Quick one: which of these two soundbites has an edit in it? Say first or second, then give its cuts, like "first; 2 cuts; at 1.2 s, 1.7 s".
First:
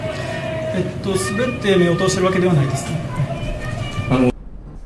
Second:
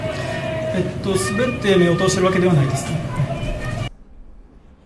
second; 1 cut; at 3.9 s